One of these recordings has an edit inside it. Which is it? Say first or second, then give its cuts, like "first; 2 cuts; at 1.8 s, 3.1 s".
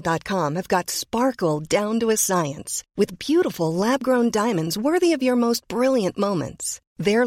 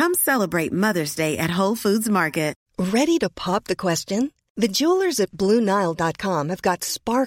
second; 1 cut; at 2.6 s